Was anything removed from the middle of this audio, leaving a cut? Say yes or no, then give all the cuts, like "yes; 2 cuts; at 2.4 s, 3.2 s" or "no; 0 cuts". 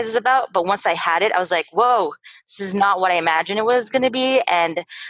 no; 0 cuts